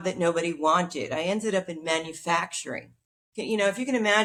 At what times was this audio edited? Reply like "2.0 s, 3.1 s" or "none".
none